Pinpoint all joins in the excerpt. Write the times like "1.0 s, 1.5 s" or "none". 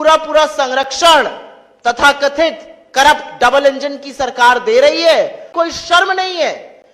5.4 s